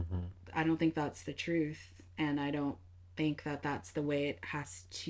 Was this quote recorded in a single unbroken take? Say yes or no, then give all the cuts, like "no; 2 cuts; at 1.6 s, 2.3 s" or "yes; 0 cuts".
yes; 0 cuts